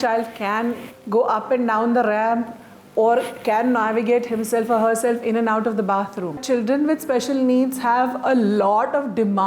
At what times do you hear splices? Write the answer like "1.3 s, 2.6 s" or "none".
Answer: 0.9 s, 6.4 s